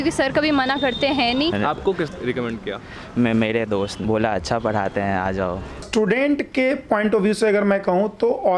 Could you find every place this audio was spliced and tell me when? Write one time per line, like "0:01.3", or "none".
0:01.5
0:05.8